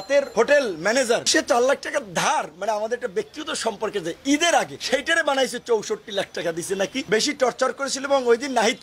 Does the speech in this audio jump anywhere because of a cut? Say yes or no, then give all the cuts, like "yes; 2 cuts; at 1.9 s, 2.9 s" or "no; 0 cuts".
yes; 2 cuts; at 1.2 s, 7.1 s